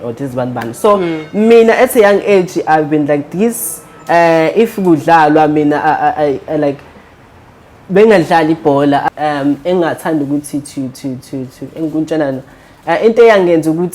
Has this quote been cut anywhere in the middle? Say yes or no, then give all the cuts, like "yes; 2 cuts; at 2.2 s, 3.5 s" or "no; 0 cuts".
yes; 1 cut; at 9.0 s